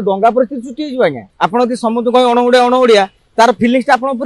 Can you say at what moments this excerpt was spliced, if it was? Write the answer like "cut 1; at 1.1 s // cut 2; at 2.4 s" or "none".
cut 1; at 1.3 s